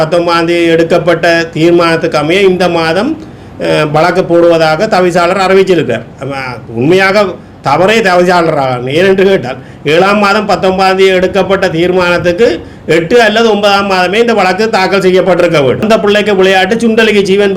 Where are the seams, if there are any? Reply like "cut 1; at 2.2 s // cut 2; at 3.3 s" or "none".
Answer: cut 1; at 15.8 s